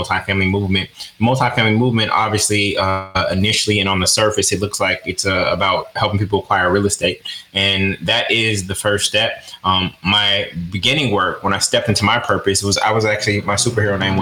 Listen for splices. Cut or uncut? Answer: uncut